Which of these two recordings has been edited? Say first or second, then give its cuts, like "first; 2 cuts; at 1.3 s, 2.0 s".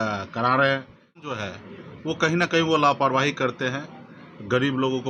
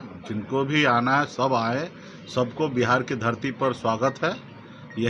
first; 1 cut; at 1.2 s